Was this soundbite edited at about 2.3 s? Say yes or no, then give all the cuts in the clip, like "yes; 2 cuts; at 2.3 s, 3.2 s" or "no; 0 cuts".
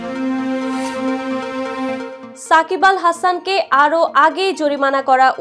yes; 1 cut; at 2.3 s